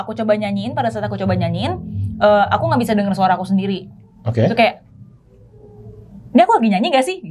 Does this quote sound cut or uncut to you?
uncut